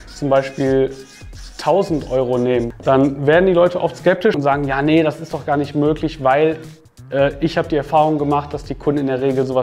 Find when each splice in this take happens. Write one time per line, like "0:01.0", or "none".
0:02.7
0:04.4